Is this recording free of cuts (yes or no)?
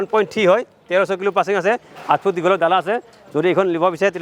yes